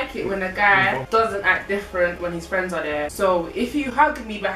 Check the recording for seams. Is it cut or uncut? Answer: cut